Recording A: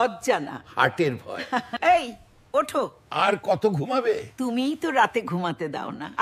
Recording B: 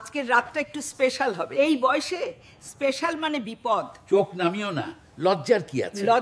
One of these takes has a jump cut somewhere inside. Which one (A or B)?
A